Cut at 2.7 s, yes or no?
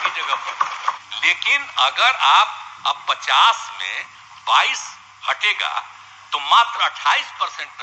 no